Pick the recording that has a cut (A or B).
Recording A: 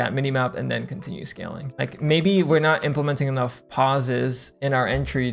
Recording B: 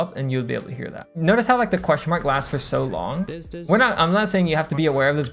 B